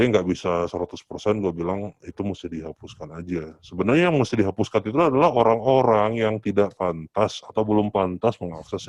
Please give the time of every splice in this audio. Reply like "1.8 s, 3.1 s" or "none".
none